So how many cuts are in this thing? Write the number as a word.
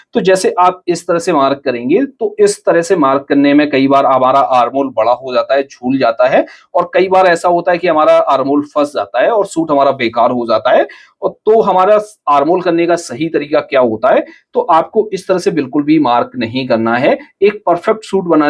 zero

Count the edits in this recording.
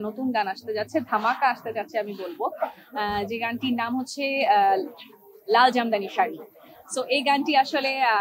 zero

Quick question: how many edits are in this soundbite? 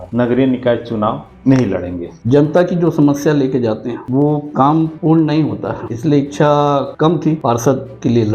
one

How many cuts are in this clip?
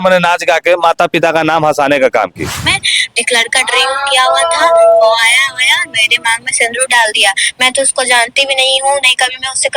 one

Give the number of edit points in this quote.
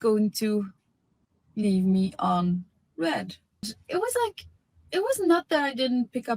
one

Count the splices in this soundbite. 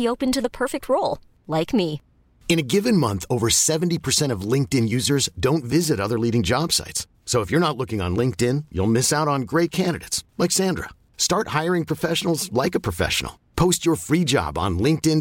zero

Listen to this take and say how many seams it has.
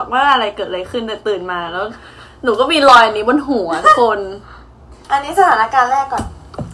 one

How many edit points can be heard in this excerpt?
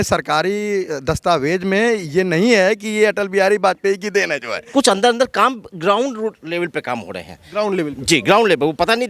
one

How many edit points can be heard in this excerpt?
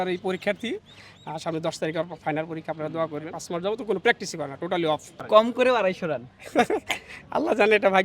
two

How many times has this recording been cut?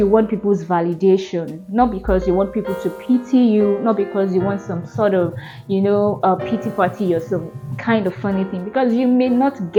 zero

